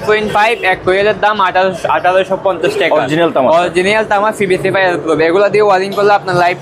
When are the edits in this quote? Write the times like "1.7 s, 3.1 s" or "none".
none

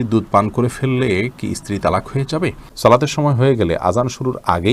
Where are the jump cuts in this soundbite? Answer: 2.6 s

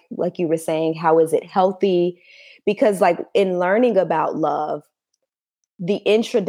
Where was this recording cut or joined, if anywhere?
none

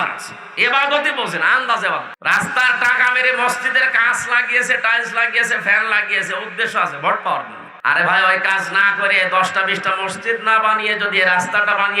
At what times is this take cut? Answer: 2.1 s, 7.6 s

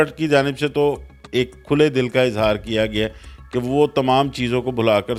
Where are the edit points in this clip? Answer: none

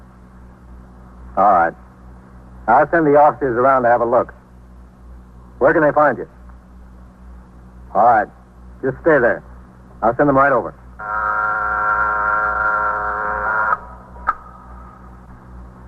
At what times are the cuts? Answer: none

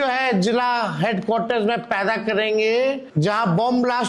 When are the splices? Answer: 3.0 s

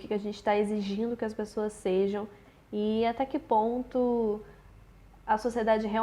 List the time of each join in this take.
none

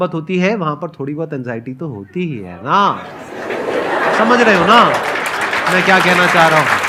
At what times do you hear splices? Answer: none

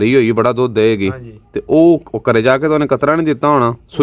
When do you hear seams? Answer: none

